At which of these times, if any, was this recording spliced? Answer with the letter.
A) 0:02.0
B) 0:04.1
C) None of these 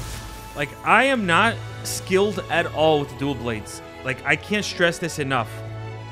C